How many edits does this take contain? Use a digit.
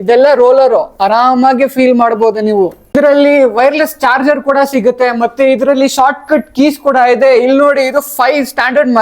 1